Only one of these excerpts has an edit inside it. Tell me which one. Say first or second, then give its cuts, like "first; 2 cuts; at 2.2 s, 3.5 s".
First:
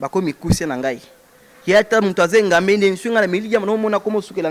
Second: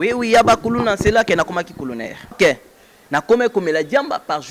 second; 1 cut; at 2.3 s